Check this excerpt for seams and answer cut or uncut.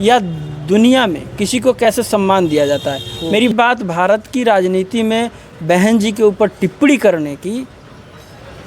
cut